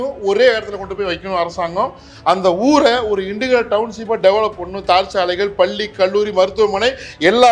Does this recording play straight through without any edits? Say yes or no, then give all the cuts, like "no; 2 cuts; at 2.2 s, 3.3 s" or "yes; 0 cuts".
yes; 0 cuts